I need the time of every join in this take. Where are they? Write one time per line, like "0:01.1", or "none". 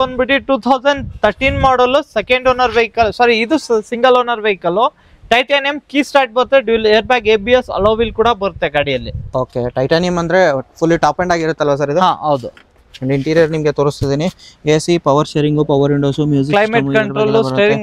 none